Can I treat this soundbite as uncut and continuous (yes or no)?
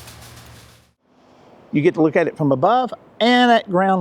no